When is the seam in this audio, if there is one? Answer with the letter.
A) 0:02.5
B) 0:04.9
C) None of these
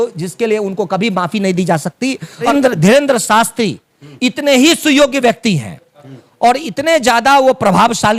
A